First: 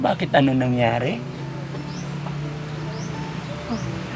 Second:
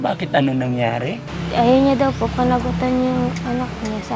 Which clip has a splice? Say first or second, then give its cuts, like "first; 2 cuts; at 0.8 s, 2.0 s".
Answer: second; 1 cut; at 1.3 s